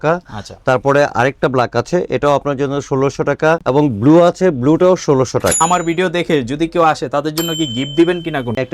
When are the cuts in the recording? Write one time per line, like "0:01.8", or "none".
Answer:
0:03.6
0:05.6